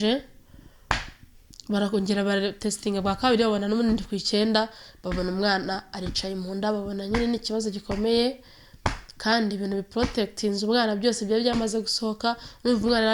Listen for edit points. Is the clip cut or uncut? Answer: uncut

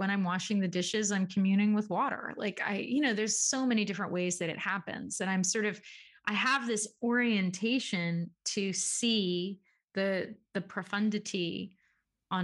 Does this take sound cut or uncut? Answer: uncut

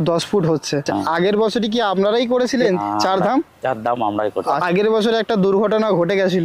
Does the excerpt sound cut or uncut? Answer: cut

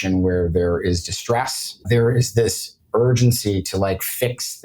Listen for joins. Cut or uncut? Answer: cut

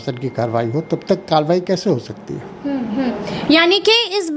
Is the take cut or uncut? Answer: uncut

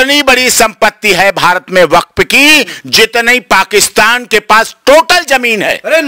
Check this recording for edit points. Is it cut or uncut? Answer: uncut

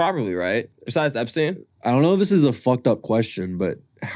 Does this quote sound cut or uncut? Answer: cut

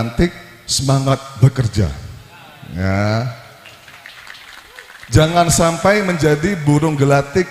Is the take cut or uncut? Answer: uncut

